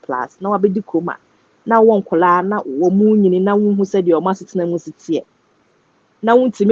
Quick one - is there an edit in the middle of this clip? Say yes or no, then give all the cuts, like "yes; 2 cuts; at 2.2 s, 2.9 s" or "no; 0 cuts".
no; 0 cuts